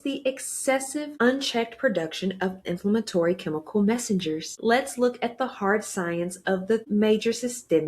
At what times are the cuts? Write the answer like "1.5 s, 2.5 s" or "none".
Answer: 6.8 s